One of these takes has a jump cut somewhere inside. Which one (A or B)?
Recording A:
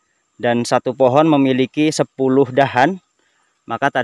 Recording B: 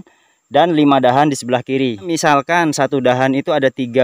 B